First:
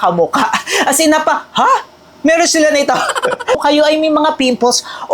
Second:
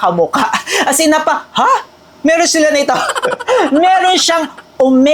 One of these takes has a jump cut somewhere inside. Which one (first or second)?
first